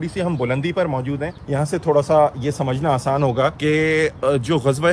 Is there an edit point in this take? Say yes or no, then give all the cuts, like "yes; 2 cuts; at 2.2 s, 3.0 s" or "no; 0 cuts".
yes; 2 cuts; at 1.3 s, 3.6 s